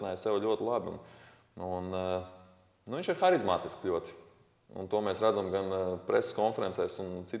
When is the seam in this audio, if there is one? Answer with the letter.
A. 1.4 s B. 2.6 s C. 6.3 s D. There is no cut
D